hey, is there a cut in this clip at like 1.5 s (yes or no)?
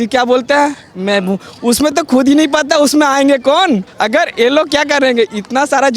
no